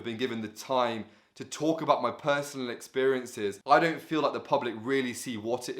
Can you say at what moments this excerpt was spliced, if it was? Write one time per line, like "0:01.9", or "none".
0:03.6